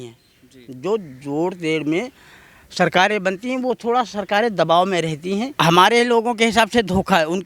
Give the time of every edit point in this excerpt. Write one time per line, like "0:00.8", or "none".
0:05.5